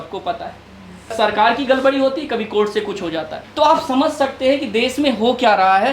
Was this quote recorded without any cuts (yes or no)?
no